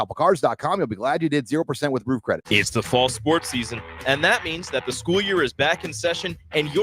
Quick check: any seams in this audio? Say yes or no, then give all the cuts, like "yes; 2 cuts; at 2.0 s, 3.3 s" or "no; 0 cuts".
yes; 1 cut; at 2.4 s